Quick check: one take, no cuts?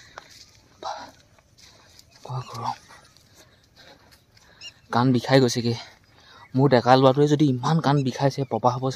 yes; 0 cuts

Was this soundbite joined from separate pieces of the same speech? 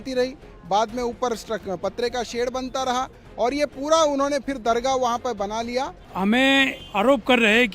yes; 2 cuts; at 6.0 s, 6.8 s

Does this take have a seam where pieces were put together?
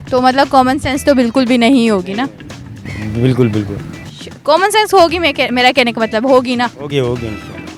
no; 0 cuts

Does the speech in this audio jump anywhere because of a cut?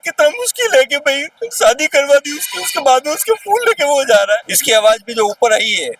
yes; 1 cut; at 4.4 s

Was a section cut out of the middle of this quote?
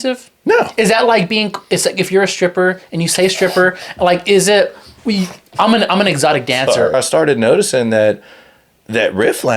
yes; 1 cut; at 6.9 s

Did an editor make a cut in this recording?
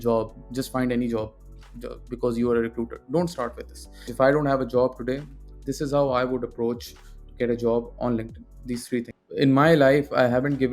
yes; 2 cuts; at 4.1 s, 9.2 s

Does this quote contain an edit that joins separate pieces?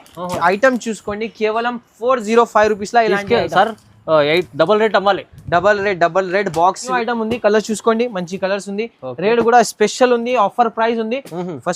yes; 1 cut; at 6.9 s

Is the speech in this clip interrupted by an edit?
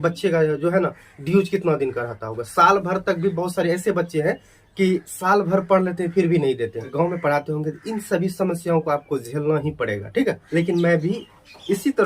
yes; 2 cuts; at 6.9 s, 10.4 s

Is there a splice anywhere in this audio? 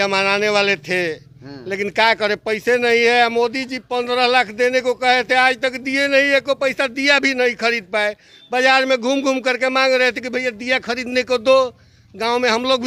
no; 0 cuts

